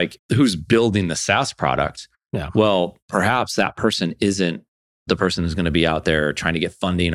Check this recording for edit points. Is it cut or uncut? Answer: uncut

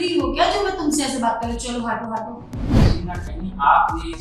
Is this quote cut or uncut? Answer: cut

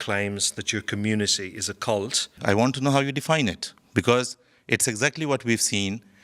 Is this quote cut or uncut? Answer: cut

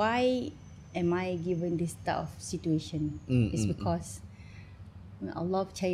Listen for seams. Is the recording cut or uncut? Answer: uncut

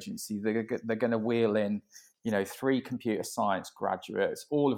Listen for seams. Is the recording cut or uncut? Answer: uncut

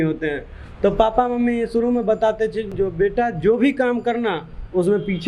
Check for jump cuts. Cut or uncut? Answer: cut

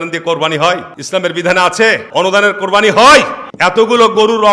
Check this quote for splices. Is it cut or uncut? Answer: cut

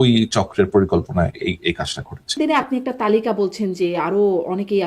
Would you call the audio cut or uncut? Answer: cut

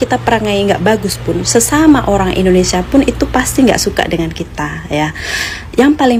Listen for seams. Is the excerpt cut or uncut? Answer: uncut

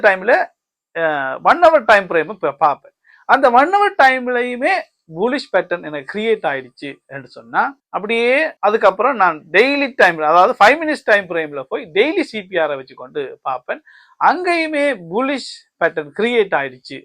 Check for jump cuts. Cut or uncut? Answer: cut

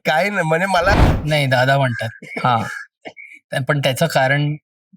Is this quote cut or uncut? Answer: cut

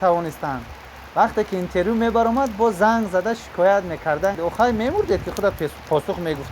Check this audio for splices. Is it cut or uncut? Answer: cut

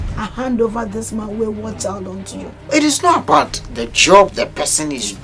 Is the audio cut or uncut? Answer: cut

